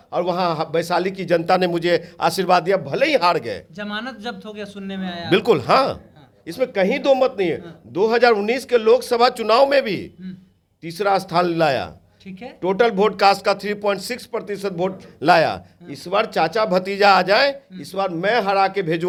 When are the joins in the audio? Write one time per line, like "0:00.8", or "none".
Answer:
none